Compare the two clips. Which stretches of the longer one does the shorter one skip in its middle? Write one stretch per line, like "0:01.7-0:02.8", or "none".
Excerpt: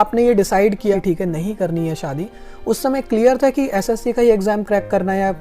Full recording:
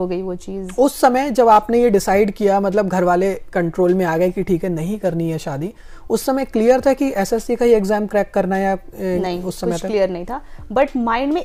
0:02.5-0:04.4